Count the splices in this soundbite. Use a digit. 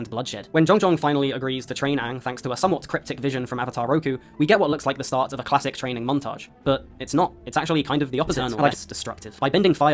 1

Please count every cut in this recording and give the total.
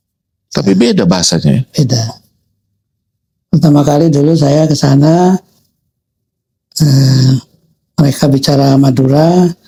0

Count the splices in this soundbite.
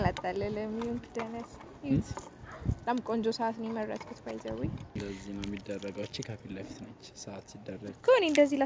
1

